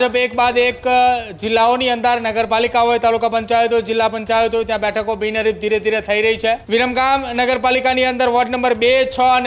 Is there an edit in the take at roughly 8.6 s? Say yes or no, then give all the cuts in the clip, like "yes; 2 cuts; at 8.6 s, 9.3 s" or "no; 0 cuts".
no; 1 cut; at 6.6 s